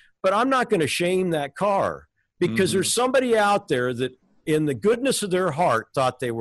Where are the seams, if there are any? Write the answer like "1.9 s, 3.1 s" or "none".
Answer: none